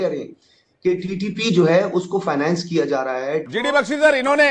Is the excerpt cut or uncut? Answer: cut